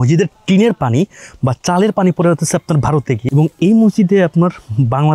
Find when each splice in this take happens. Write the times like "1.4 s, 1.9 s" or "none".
3.2 s